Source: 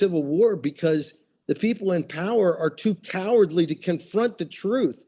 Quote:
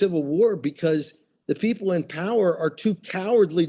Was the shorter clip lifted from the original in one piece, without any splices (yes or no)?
yes